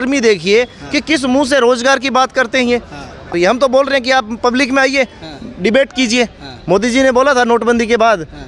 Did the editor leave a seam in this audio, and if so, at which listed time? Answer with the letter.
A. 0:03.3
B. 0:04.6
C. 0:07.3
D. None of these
A